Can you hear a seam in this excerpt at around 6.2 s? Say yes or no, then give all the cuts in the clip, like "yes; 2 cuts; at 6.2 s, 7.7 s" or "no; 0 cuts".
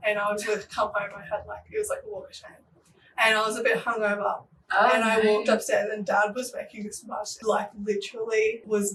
no; 0 cuts